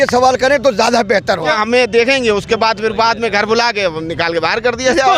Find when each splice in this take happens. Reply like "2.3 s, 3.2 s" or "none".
1.5 s